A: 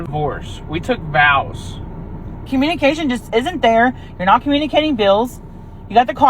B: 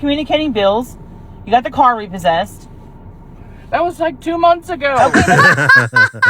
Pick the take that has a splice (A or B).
A